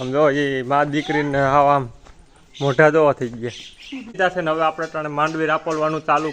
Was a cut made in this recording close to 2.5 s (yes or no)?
no